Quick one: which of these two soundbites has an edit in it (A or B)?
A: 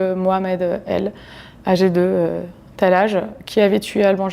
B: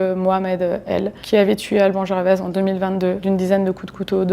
B